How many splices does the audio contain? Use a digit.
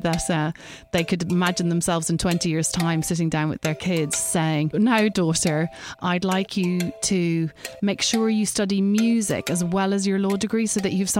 2